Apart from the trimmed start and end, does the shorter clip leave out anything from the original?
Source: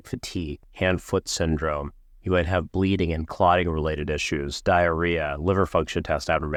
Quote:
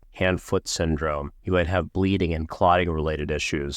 yes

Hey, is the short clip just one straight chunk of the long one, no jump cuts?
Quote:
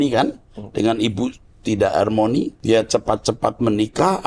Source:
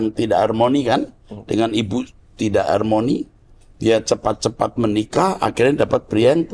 no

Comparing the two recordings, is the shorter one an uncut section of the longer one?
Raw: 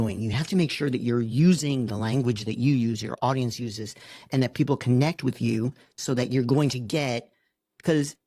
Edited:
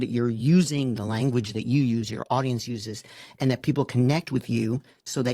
yes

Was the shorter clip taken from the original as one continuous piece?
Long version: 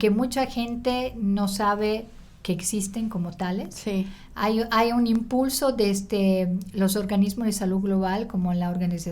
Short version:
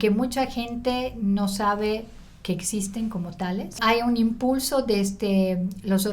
no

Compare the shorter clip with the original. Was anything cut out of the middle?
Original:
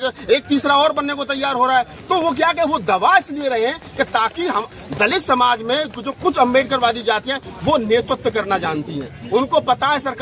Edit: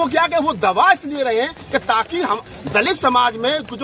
no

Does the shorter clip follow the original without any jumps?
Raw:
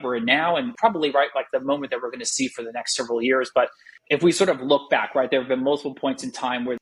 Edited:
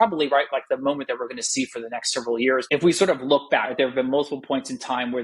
no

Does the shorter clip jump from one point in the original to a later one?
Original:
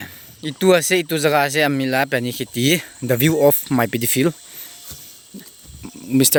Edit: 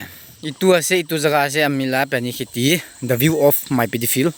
no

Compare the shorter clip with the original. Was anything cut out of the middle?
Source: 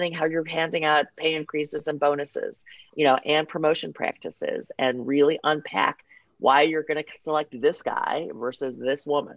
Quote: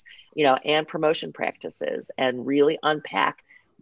no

